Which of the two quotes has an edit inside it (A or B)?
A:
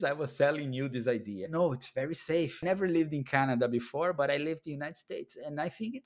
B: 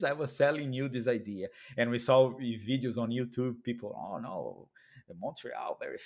A